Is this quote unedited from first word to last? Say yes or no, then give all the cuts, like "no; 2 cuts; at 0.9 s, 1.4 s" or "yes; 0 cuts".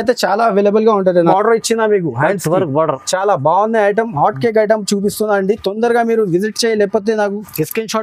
no; 1 cut; at 1.2 s